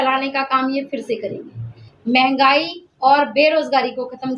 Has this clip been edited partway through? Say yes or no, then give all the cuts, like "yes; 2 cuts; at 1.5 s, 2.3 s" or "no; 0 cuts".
yes; 1 cut; at 1.9 s